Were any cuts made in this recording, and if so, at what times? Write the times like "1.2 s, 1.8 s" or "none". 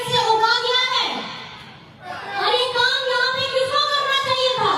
2.2 s